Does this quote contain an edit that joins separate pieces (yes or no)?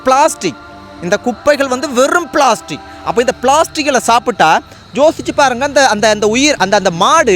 no